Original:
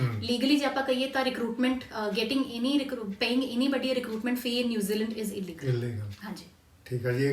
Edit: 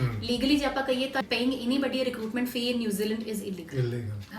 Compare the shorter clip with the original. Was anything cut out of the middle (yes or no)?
yes